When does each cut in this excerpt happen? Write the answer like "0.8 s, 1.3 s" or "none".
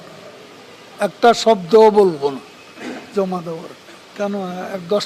4.1 s